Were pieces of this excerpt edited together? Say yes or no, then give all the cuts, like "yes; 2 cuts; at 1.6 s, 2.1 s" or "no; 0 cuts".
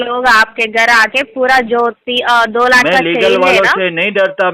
no; 0 cuts